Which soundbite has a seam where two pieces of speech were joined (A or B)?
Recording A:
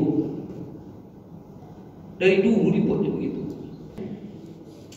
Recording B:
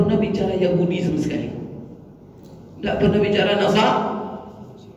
A